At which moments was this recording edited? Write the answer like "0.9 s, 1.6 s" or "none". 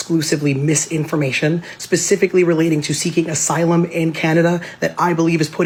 none